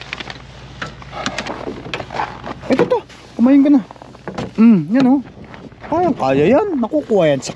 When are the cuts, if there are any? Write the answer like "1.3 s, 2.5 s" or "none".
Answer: 1.5 s